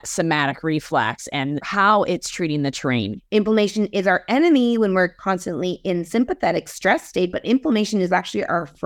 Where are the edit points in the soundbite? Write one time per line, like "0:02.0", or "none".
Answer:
0:01.7
0:03.2